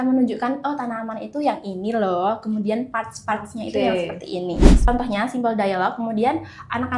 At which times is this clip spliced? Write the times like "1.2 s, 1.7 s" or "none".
4.9 s